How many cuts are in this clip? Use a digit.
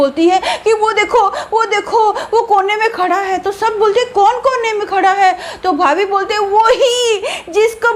0